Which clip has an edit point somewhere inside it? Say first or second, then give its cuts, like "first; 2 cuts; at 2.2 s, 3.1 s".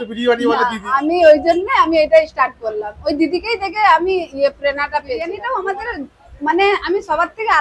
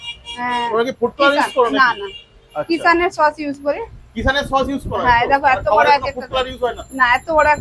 first; 1 cut; at 5.4 s